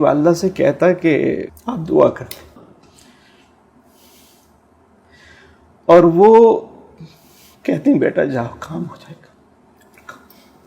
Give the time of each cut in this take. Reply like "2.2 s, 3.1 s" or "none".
1.6 s, 2.6 s